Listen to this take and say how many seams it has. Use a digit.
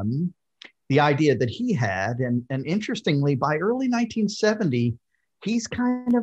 0